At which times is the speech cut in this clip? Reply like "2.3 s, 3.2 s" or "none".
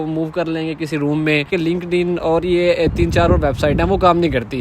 1.5 s